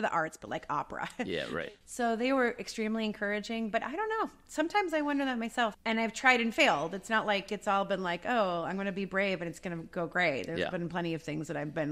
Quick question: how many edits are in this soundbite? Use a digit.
2